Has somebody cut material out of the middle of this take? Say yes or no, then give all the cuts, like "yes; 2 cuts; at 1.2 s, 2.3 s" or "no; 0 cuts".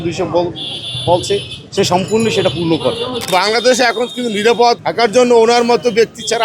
yes; 2 cuts; at 3.1 s, 4.8 s